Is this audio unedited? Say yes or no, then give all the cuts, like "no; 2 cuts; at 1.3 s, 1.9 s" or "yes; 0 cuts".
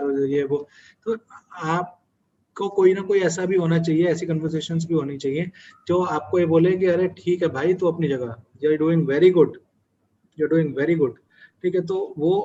yes; 0 cuts